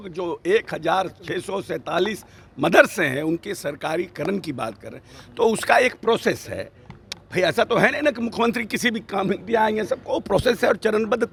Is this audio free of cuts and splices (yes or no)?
yes